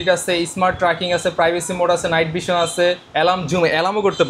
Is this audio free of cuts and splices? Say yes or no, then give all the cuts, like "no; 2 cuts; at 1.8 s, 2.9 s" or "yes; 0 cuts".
yes; 0 cuts